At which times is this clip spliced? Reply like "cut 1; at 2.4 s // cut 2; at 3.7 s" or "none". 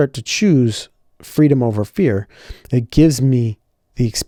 none